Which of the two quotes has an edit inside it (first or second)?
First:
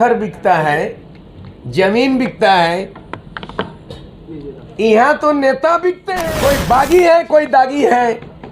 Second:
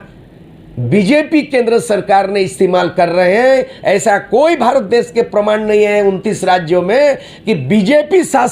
first